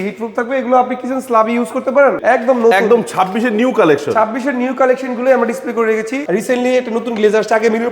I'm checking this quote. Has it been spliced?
yes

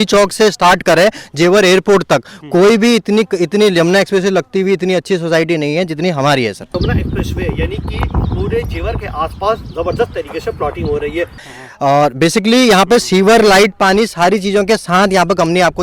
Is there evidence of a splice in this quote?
yes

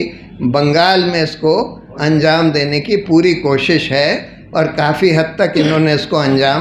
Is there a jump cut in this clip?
no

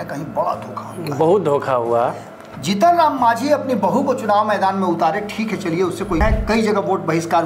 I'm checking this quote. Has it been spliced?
yes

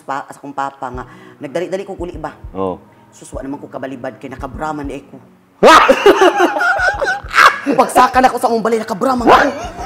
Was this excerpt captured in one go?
yes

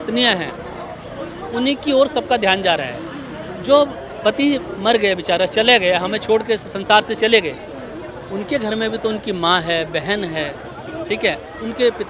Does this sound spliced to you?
no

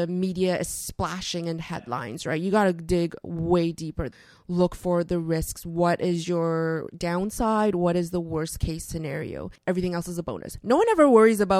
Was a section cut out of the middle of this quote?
yes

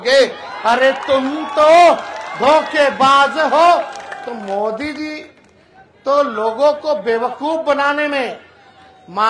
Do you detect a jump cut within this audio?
no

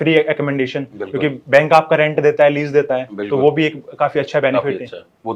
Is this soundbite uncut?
yes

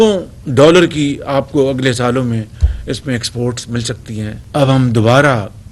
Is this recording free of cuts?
no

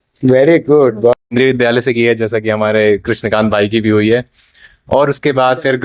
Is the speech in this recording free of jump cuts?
no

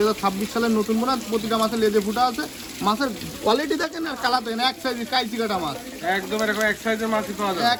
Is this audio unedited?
yes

